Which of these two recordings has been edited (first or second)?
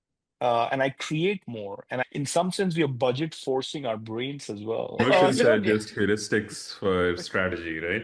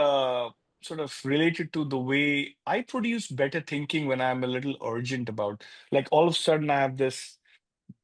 first